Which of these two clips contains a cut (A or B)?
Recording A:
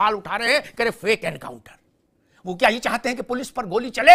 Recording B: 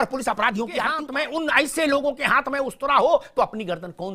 B